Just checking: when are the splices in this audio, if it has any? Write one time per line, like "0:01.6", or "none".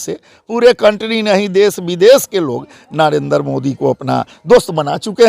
none